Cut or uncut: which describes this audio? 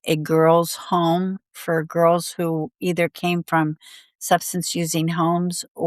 cut